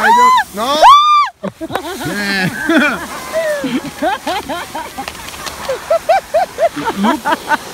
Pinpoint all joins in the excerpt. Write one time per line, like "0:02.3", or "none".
none